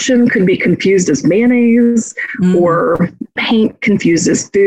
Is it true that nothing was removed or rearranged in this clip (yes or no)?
no